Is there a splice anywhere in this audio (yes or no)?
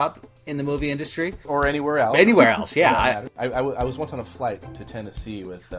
yes